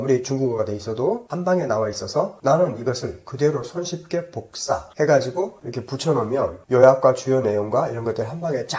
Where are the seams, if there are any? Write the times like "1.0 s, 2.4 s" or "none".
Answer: 1.3 s, 5.6 s